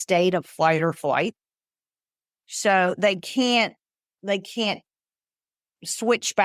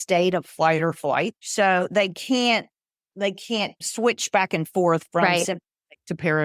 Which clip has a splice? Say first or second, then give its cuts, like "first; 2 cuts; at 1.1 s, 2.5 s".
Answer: second; 2 cuts; at 1.4 s, 3.8 s